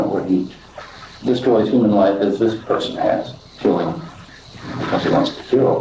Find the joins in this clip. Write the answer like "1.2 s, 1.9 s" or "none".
3.5 s